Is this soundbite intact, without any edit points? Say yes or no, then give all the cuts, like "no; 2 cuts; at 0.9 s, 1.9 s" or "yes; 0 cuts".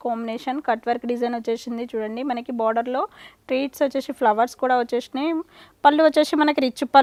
yes; 0 cuts